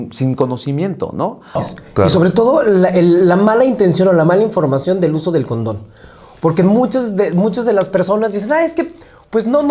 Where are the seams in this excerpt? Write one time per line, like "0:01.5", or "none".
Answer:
0:01.4